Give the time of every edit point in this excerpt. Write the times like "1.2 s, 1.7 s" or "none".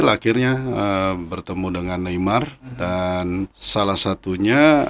3.6 s